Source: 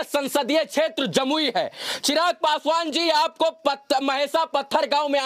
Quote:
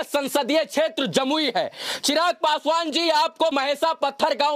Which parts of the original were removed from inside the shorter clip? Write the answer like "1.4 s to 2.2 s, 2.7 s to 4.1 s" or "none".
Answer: 3.5 s to 4.0 s